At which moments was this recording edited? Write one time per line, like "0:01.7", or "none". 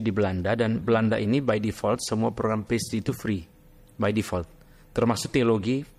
none